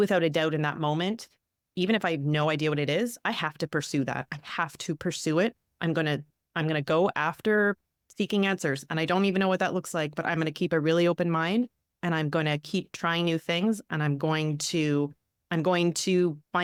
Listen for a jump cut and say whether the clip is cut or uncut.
uncut